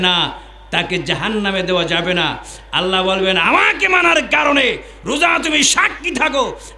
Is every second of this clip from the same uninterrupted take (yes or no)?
yes